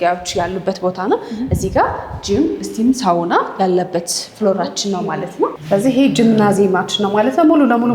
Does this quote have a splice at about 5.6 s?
yes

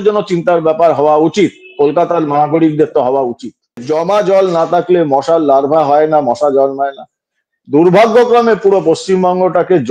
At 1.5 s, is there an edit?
no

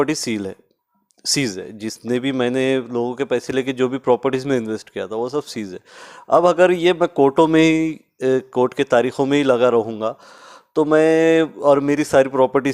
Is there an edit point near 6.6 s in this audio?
no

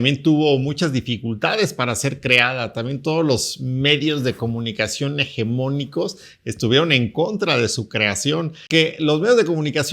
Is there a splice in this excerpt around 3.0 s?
no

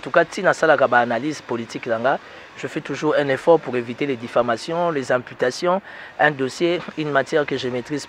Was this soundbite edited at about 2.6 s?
no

